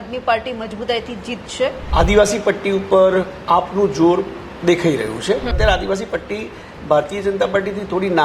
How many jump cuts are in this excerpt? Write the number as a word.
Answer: two